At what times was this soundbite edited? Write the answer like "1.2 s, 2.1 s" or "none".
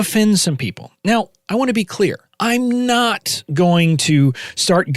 2.3 s